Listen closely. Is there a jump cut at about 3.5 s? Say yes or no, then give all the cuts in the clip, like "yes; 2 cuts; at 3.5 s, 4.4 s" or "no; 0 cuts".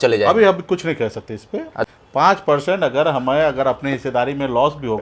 no; 1 cut; at 1.9 s